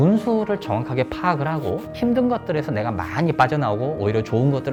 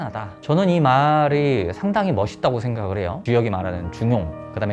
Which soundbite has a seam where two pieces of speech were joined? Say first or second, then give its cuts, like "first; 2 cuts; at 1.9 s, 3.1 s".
second; 1 cut; at 3.2 s